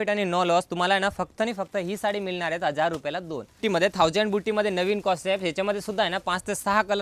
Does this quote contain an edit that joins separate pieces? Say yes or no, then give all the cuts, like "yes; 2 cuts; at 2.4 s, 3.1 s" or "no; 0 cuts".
yes; 1 cut; at 3.6 s